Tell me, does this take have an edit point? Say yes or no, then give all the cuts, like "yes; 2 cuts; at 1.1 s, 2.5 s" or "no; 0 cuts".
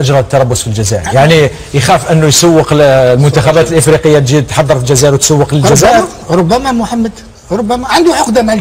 no; 0 cuts